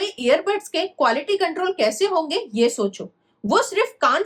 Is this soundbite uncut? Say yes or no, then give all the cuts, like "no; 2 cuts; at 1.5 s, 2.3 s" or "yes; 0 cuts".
yes; 0 cuts